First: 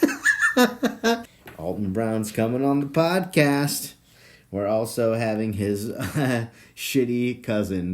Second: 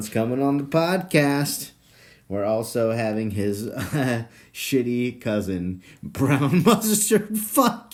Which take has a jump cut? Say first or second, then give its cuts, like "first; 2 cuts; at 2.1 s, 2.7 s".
first; 1 cut; at 1.3 s